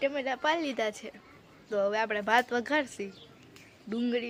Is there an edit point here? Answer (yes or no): no